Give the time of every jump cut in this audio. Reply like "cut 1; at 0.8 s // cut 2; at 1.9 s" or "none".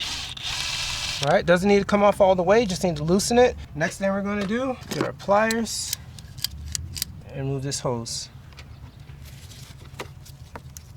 cut 1; at 1.2 s // cut 2; at 3.7 s // cut 3; at 4.9 s // cut 4; at 7.2 s